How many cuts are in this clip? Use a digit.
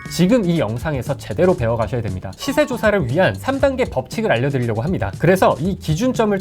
1